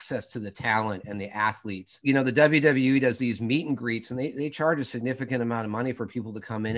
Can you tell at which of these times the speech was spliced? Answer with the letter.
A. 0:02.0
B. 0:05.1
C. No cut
A